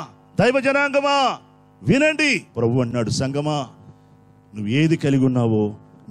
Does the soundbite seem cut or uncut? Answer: cut